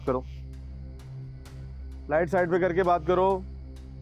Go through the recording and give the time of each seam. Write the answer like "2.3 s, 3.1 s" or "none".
none